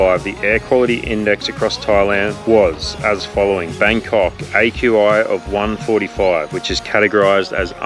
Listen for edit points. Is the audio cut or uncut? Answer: uncut